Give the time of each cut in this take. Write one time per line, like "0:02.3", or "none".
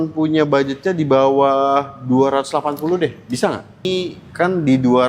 0:03.8

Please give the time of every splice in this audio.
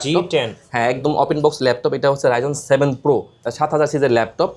0:03.4

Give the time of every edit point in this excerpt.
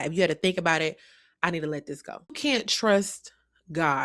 0:02.3

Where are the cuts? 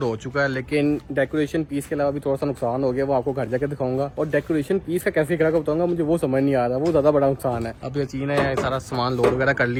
none

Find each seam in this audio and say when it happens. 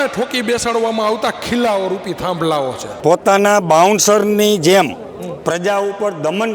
0:02.8

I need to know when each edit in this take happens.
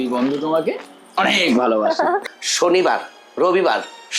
0:02.3

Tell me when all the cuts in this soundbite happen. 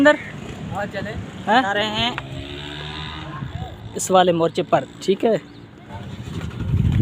0:01.7
0:05.9

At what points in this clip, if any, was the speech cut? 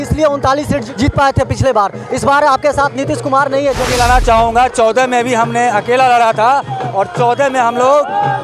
0:00.9
0:03.9

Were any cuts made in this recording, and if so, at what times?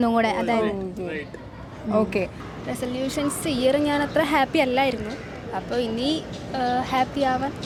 none

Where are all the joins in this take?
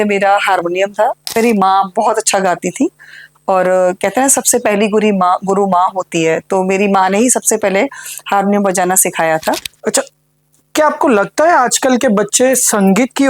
0:01.4
0:09.7

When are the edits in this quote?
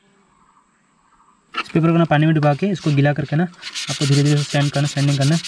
0:01.6

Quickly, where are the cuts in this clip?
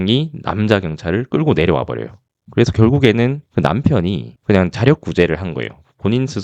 none

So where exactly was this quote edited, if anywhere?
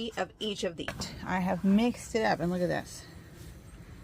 0:01.0

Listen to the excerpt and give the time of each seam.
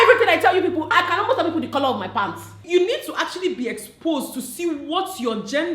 0:00.9
0:02.6

